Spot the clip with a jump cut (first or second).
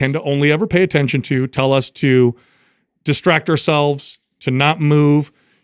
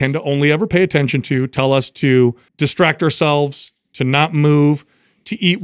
second